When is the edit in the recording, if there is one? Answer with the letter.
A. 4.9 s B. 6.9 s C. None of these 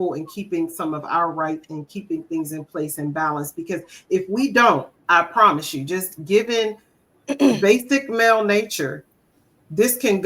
A